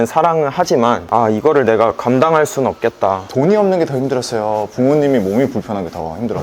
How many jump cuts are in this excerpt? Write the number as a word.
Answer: one